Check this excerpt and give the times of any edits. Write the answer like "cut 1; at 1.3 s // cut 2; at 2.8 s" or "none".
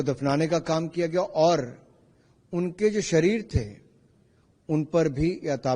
none